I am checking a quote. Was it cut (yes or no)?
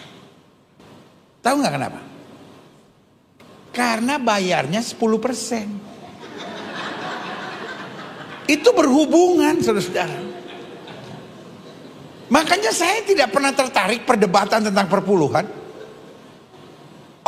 no